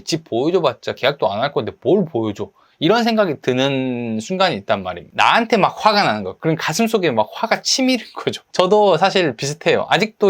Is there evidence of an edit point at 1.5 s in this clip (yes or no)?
no